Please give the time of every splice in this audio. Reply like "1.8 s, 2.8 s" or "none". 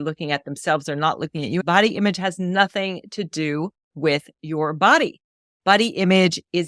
1.6 s